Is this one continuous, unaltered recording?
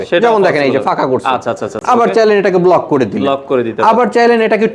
yes; 0 cuts

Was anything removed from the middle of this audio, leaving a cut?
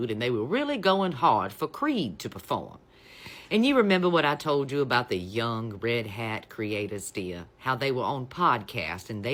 no; 0 cuts

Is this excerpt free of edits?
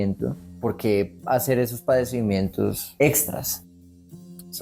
no; 2 cuts; at 2.8 s, 3.8 s

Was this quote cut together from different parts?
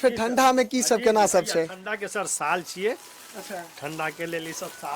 no; 0 cuts

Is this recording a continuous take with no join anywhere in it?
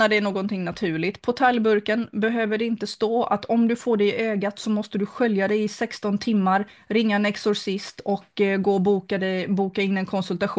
yes; 0 cuts

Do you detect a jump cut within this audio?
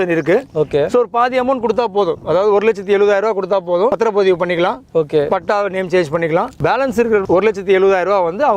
yes; 2 cuts; at 3.9 s, 7.0 s

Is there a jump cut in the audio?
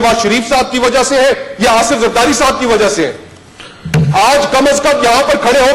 no; 0 cuts

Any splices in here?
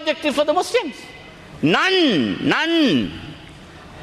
no; 0 cuts

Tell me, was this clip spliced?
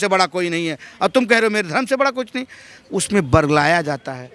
no; 0 cuts

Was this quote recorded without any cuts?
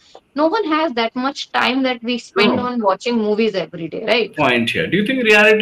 no; 1 cut; at 4.3 s

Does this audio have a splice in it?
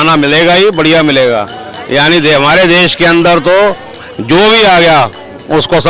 no; 0 cuts

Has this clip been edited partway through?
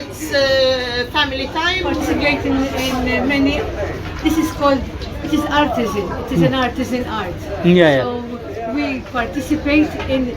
yes; 1 cut; at 2.0 s

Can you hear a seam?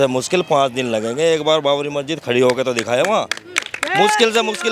no; 0 cuts

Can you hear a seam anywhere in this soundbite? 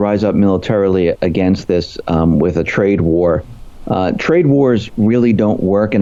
no; 0 cuts

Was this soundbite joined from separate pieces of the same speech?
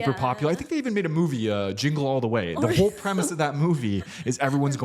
no; 0 cuts

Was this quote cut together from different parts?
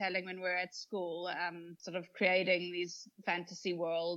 yes; 1 cut; at 1.7 s

